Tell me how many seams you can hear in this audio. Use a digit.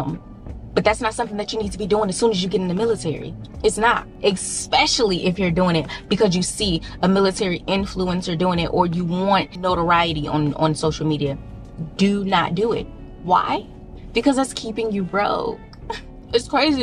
0